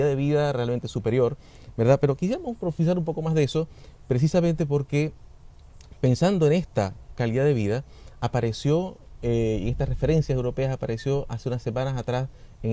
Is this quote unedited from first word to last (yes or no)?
no